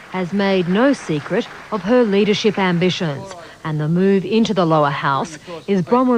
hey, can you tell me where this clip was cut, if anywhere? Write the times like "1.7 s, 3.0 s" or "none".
none